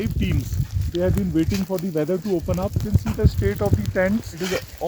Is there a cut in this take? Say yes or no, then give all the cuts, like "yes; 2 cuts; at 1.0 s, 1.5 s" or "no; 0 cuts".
no; 0 cuts